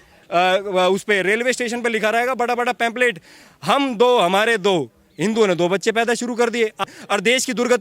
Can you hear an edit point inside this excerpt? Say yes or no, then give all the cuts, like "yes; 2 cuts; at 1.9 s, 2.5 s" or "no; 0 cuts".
yes; 1 cut; at 6.9 s